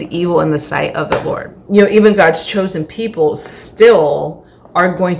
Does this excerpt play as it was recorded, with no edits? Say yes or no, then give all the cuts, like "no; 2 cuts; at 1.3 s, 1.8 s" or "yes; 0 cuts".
no; 1 cut; at 1.6 s